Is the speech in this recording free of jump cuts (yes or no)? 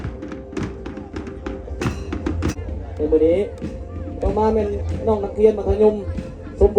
no